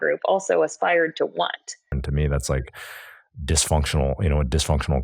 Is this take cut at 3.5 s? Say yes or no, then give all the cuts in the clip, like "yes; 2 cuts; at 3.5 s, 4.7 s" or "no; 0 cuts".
no; 1 cut; at 2.0 s